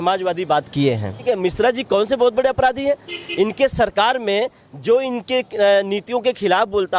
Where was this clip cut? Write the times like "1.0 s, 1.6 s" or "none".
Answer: 1.2 s

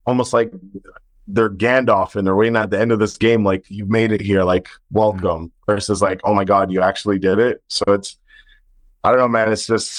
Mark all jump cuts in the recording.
none

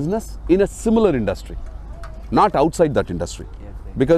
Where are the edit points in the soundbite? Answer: none

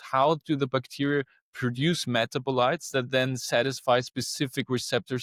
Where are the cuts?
none

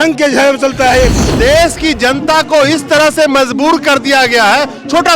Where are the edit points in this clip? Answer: 1.2 s

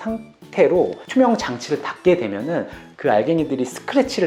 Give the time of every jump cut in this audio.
1.0 s

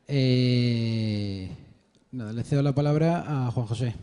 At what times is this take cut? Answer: 2.7 s

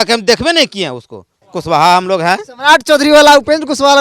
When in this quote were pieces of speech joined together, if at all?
1.3 s

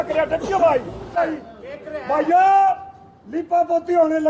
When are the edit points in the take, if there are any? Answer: 1.2 s

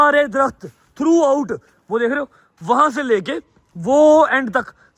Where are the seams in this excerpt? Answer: none

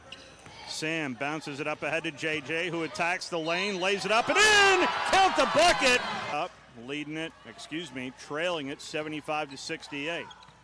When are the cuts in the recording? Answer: none

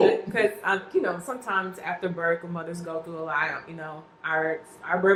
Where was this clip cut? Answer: none

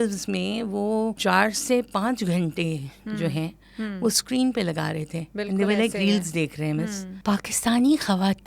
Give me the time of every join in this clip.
1.2 s, 7.1 s

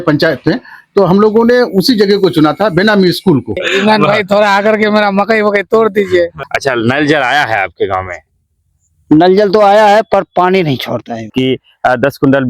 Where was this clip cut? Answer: 3.6 s, 6.3 s, 11.3 s

